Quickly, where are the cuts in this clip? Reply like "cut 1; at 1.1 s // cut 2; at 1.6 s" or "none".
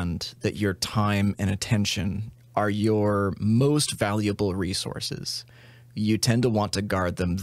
none